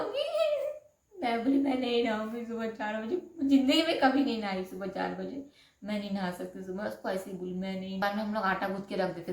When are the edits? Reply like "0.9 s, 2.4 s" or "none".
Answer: 8.0 s